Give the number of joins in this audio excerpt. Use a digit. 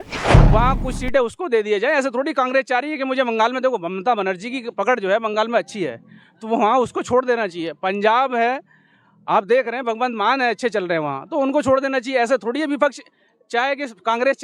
0